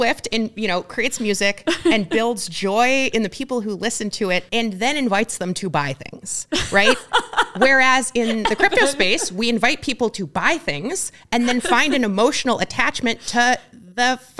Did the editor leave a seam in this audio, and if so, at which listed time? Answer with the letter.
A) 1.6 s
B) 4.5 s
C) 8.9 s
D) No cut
B